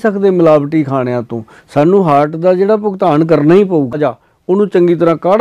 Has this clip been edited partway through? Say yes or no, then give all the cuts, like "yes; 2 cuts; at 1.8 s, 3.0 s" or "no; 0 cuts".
yes; 1 cut; at 4.0 s